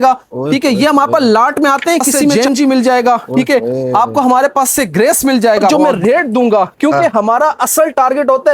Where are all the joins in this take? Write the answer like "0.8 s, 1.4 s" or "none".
2.4 s, 5.7 s